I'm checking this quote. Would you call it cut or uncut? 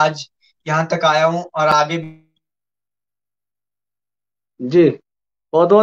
uncut